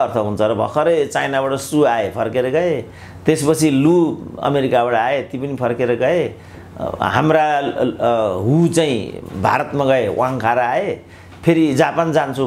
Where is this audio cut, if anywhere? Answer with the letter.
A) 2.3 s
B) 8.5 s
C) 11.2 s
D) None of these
D